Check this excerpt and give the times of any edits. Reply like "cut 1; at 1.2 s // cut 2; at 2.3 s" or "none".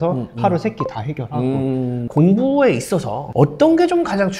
cut 1; at 2.1 s // cut 2; at 3.2 s